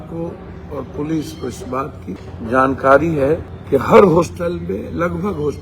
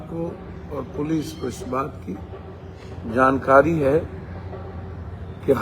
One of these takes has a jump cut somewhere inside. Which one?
first; 2 cuts; at 2.2 s, 3.5 s

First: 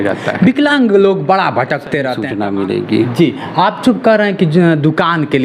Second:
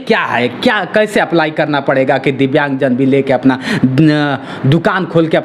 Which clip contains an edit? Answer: first; 1 cut; at 2.2 s

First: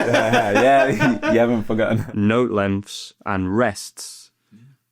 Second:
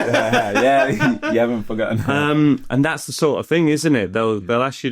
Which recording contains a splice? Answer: first; 1 cut; at 2.0 s

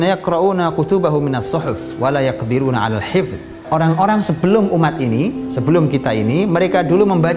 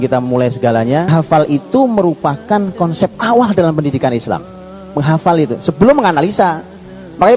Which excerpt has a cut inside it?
second; 1 cut; at 1.1 s

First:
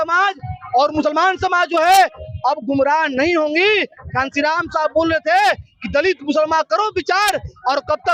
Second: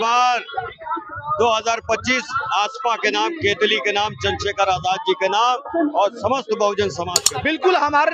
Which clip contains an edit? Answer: second; 1 cut; at 7.1 s

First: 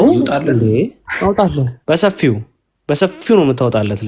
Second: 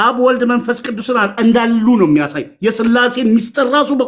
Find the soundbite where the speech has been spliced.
first; 1 cut; at 1.7 s

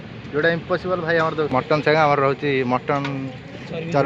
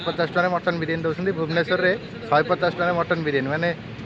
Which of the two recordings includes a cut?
first; 1 cut; at 1.8 s

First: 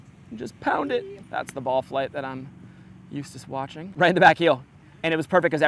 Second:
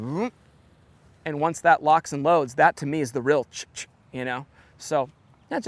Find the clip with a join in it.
first; 2 cuts; at 1.2 s, 3.9 s

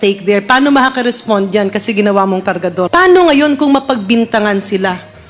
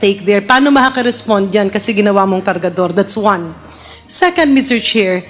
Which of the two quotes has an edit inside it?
first; 1 cut; at 2.9 s

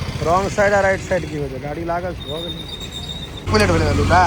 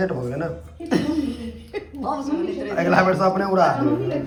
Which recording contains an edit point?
first; 1 cut; at 3.3 s

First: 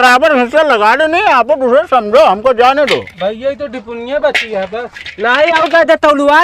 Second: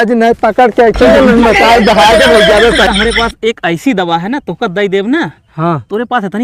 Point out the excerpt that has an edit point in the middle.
second; 1 cut; at 2.9 s

